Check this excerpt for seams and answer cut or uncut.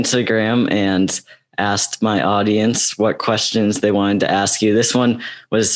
uncut